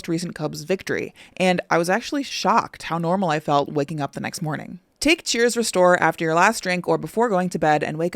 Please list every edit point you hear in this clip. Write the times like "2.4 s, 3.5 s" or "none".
4.8 s